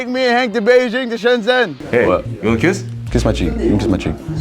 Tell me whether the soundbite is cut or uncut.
cut